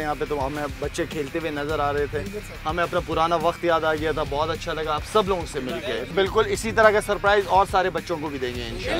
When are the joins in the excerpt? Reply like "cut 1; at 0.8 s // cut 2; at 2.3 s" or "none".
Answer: cut 1; at 6.1 s